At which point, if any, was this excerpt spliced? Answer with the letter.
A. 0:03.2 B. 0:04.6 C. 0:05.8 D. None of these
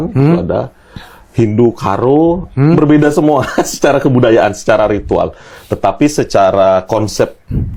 D